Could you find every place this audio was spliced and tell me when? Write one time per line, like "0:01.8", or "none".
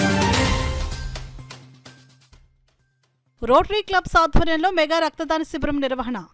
0:03.2